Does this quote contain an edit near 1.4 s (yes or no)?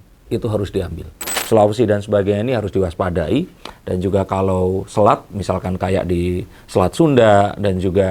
yes